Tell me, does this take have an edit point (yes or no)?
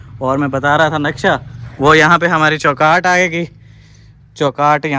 no